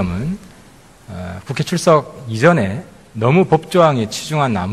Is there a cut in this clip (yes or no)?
yes